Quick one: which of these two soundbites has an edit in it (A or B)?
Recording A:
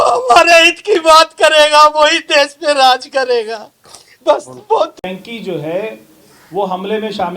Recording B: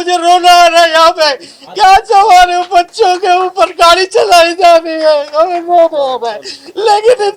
A